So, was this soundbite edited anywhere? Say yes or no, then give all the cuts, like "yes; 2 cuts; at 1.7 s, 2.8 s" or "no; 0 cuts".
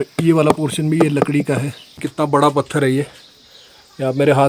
yes; 1 cut; at 2.0 s